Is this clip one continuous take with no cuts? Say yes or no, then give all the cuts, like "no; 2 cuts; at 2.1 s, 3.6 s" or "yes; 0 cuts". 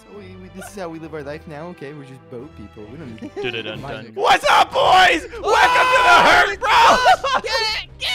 no; 1 cut; at 4.1 s